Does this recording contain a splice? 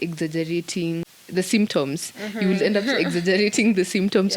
yes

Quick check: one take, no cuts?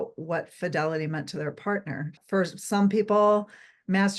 no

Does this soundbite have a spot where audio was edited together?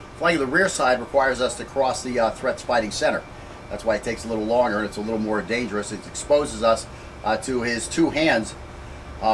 yes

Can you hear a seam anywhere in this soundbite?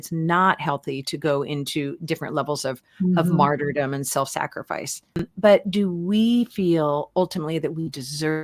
yes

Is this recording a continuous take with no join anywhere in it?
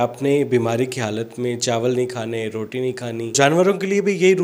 no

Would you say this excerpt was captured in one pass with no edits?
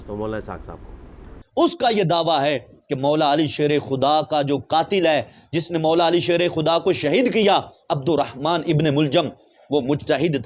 no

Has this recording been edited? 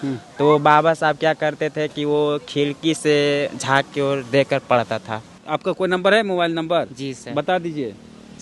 yes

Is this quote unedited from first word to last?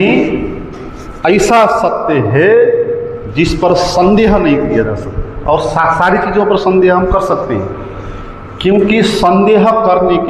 yes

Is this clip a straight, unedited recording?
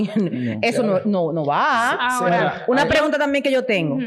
yes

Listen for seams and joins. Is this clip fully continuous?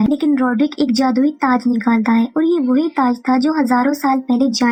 yes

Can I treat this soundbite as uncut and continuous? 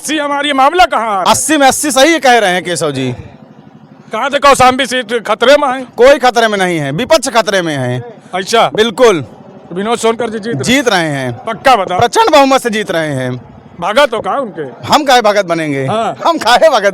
yes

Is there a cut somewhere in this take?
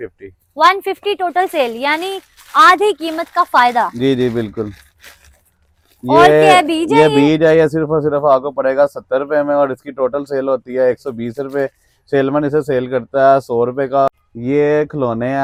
no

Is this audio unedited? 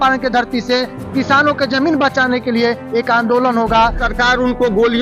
no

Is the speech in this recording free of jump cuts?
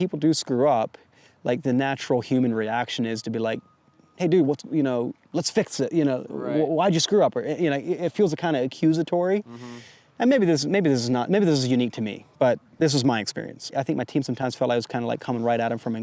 yes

